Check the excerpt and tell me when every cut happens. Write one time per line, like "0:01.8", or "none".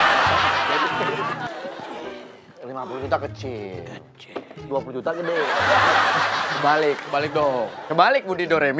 0:01.5